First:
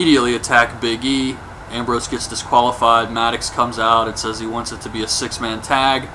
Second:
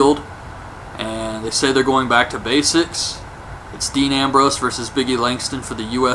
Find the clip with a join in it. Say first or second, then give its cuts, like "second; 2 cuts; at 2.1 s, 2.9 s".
second; 1 cut; at 2.1 s